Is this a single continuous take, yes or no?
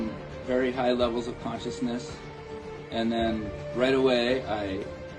yes